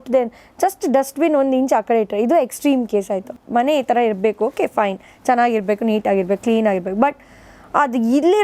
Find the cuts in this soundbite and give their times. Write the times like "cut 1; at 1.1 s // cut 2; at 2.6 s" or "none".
cut 1; at 3.4 s